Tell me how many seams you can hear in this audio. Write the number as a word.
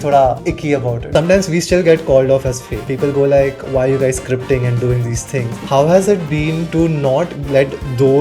three